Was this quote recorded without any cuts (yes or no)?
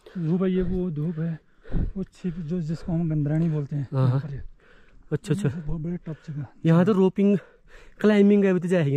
yes